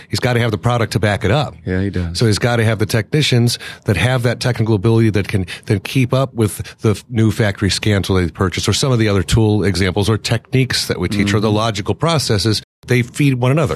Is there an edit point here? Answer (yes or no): yes